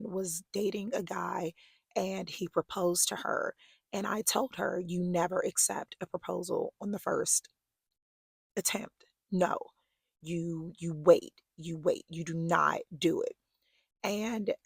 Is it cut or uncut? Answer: uncut